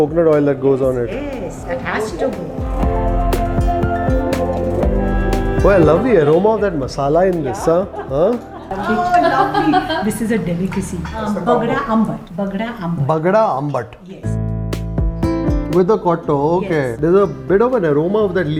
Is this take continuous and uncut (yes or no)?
no